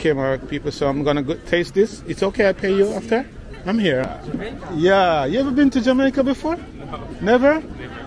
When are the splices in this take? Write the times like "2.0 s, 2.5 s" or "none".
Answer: 4.1 s